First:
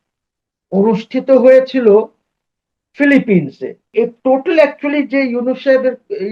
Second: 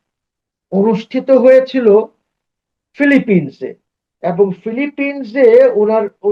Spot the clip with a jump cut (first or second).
first